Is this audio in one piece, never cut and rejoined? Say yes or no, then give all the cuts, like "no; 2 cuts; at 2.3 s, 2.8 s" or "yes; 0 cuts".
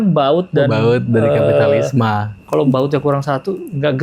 no; 1 cut; at 2.4 s